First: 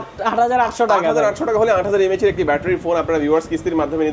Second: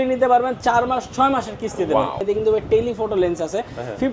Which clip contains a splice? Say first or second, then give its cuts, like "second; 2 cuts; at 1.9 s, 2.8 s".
second; 1 cut; at 2.2 s